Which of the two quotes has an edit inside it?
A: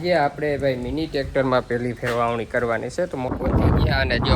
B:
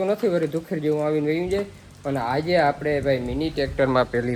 A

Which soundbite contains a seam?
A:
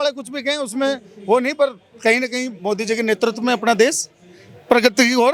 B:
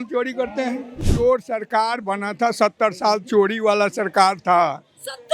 B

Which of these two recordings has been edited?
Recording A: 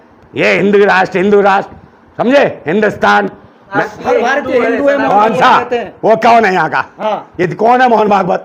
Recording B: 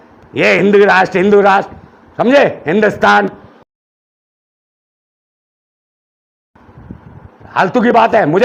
A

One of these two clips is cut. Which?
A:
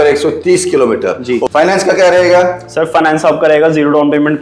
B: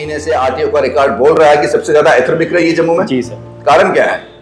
A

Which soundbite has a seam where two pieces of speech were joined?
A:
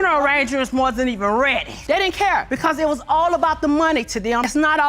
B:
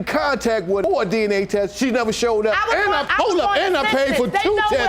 A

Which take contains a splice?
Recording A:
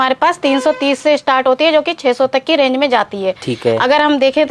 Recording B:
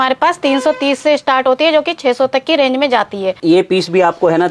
B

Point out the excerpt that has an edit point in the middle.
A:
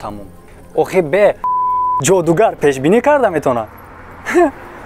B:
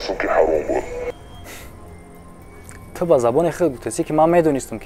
A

